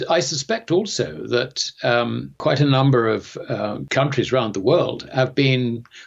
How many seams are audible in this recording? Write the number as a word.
two